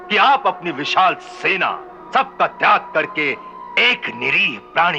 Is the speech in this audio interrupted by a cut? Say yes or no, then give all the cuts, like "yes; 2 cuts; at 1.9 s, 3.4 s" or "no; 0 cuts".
yes; 1 cut; at 1.9 s